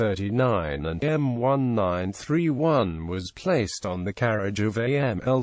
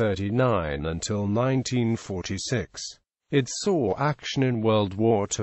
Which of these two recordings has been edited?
second; 1 cut; at 1.0 s

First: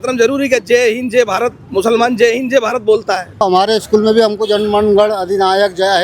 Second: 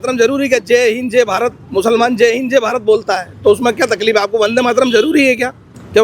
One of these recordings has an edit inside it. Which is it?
first; 1 cut; at 3.4 s

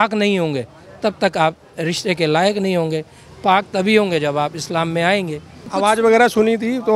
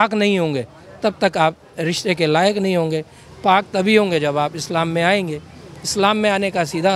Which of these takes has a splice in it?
first; 1 cut; at 5.6 s

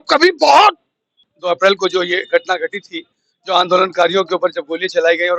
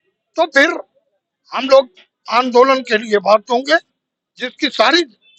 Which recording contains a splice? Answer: first; 1 cut; at 1.2 s

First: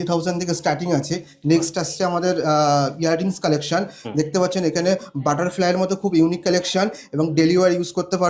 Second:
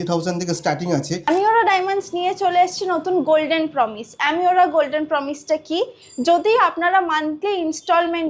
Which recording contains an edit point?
second; 1 cut; at 1.3 s

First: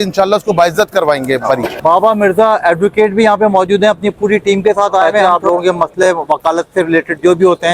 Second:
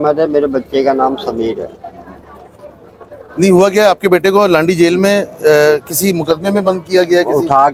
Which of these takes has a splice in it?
first; 2 cuts; at 1.7 s, 5.1 s

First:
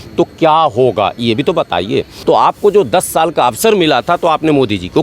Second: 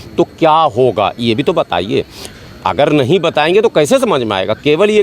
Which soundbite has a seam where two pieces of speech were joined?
first; 1 cut; at 2.1 s

